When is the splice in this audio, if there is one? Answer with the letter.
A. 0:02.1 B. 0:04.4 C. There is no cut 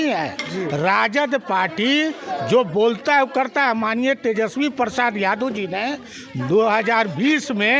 C